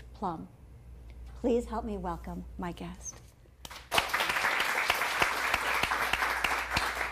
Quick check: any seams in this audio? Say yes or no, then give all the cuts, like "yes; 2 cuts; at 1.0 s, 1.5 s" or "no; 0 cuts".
yes; 1 cut; at 1.3 s